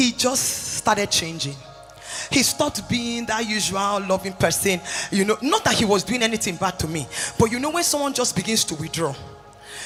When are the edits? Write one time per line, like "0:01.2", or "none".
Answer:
none